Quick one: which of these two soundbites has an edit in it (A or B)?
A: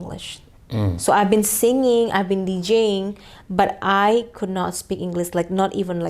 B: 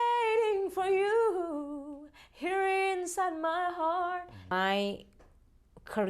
B